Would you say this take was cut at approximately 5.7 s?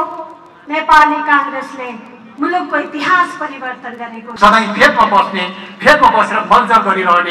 no; 1 cut; at 4.2 s

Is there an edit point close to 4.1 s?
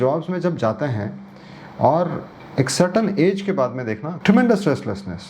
yes; 1 cut; at 4.1 s

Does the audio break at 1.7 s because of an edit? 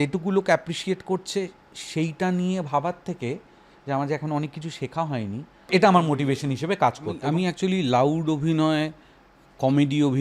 no; 2 cuts; at 5.7 s, 7.2 s

